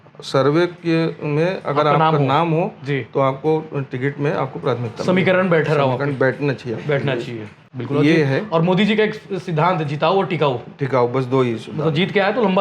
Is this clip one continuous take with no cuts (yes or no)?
yes